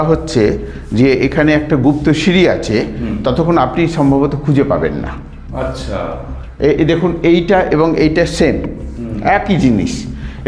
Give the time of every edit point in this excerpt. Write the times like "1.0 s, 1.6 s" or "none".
none